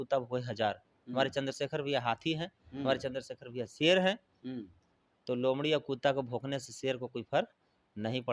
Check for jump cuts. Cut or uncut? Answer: uncut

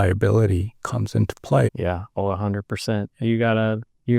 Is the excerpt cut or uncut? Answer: cut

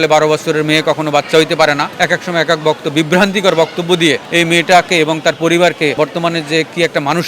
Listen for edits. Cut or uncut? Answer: cut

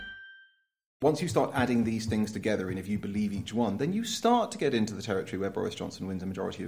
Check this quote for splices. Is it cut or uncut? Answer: cut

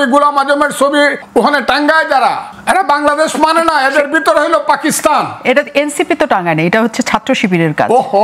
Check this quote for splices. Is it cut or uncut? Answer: cut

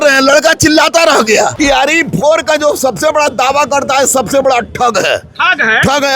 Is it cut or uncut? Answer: cut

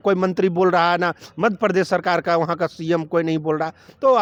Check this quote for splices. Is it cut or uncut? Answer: uncut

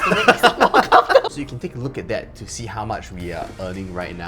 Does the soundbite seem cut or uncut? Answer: cut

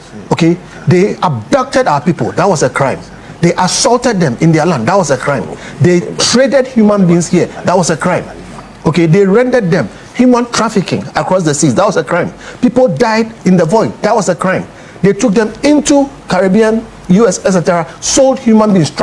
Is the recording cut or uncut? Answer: uncut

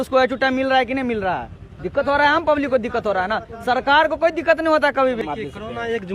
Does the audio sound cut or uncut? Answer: cut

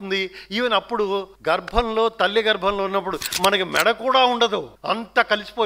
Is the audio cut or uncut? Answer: cut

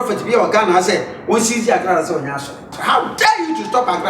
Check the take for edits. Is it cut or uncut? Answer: cut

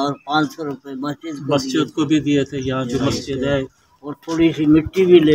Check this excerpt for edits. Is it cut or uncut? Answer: uncut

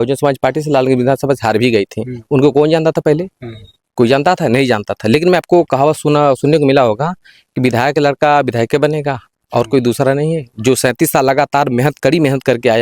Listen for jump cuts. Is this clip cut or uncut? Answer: cut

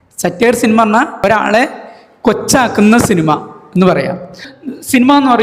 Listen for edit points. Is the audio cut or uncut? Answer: cut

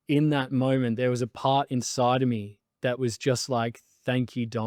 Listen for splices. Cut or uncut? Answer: uncut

